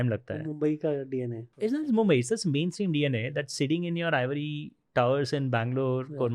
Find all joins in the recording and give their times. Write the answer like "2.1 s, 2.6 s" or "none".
1.4 s